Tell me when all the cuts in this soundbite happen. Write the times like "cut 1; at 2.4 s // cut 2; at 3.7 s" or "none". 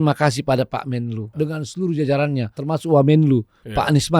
cut 1; at 1.3 s // cut 2; at 2.6 s